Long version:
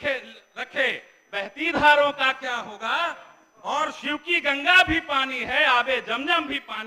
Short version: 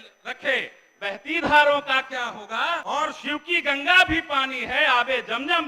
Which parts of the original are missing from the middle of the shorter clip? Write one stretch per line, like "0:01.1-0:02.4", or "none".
0:03.1-0:03.6